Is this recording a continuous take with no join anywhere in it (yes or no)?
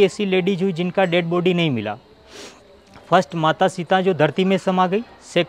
yes